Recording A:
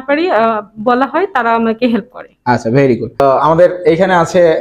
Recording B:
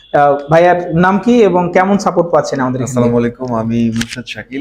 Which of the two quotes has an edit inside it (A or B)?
A